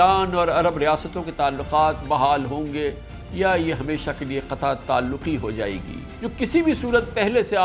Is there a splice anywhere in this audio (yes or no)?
yes